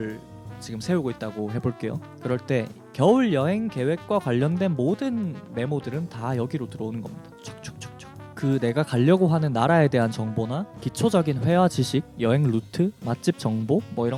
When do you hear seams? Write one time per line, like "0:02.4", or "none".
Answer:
none